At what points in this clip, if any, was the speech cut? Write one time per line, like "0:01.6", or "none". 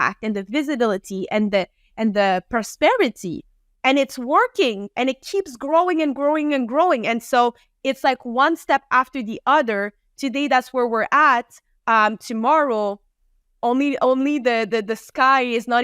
none

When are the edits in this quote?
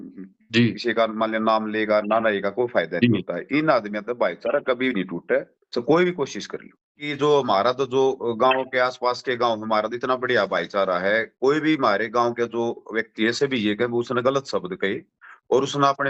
0:07.0

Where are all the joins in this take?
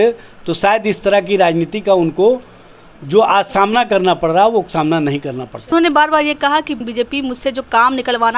0:05.7
0:06.8

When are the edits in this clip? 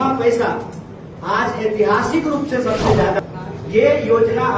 0:03.2

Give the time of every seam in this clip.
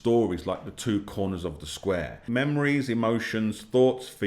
0:02.2

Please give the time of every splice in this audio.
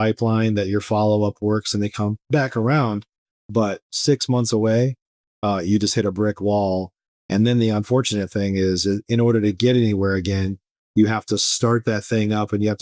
0:02.2
0:03.9

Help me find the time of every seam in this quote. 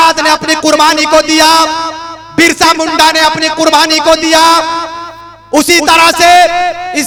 none

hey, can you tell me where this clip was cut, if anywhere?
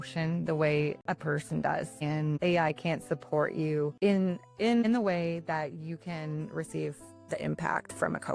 0:01.0
0:03.9

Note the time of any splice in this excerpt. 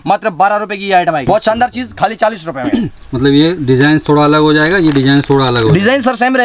0:01.2

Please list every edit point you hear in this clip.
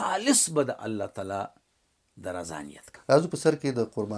0:02.9

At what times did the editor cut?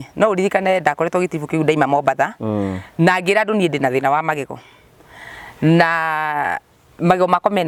none

